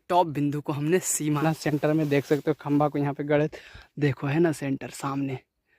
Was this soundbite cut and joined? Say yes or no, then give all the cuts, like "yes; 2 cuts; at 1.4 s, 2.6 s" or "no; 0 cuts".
yes; 1 cut; at 1.4 s